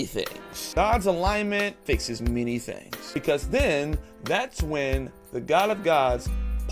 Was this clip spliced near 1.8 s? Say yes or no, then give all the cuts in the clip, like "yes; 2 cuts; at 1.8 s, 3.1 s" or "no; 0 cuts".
yes; 3 cuts; at 0.8 s, 1.8 s, 3.2 s